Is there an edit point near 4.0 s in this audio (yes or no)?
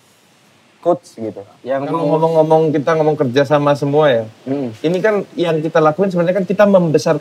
no